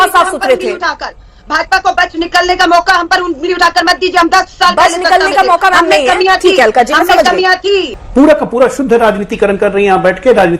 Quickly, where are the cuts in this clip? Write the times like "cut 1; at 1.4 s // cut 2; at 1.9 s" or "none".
cut 1; at 7.9 s